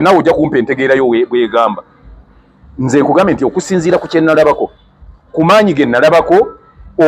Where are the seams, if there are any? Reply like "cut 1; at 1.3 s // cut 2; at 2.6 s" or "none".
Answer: none